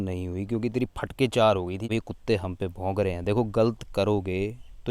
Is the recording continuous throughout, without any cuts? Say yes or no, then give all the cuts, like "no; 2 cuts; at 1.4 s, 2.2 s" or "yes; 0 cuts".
no; 1 cut; at 1.8 s